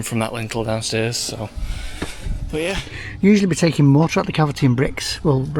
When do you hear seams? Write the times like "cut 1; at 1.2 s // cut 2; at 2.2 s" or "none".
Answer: cut 1; at 2.9 s

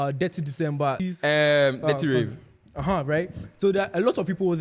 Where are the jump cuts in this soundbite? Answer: none

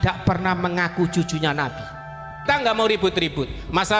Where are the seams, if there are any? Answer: cut 1; at 2.5 s

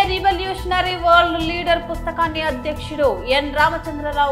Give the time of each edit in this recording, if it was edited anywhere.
none

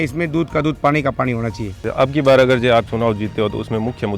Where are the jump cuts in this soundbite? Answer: cut 1; at 1.8 s

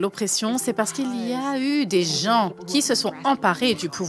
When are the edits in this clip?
cut 1; at 2.6 s

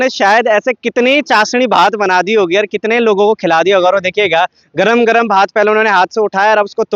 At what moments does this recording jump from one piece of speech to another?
none

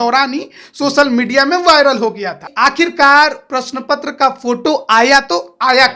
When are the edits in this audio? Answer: cut 1; at 2.4 s

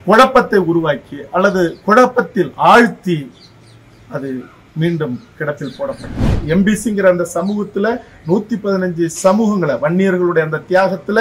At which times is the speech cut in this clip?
cut 1; at 6.3 s

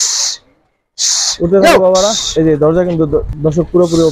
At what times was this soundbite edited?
cut 1; at 2.2 s

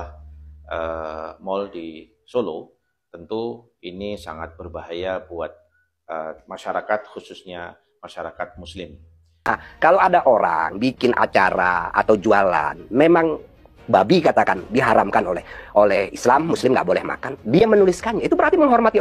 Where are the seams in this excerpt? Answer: cut 1; at 9.5 s

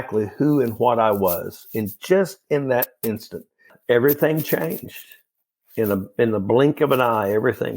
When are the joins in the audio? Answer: cut 1; at 3.7 s

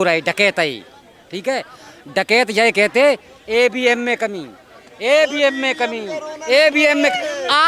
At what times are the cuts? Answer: none

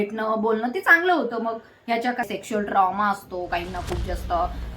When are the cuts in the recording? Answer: cut 1; at 2.2 s

